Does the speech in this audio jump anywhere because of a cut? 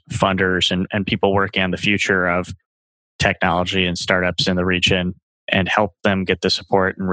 no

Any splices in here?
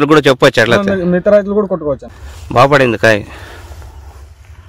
yes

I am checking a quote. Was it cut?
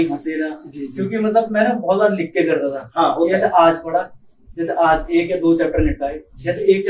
no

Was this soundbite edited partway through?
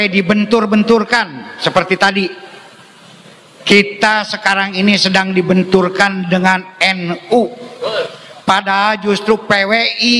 no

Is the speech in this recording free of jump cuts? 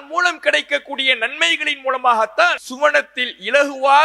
no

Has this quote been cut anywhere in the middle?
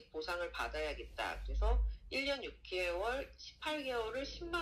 no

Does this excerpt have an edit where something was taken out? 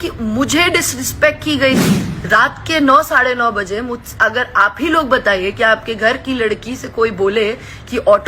yes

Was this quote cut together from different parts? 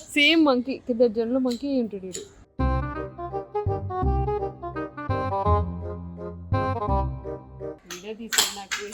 yes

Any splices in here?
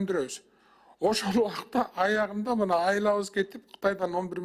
no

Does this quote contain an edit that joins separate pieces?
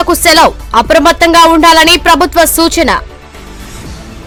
no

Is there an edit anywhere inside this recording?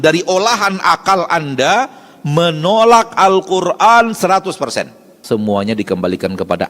yes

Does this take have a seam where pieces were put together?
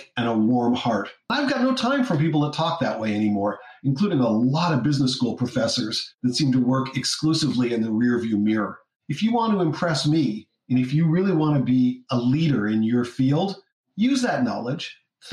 yes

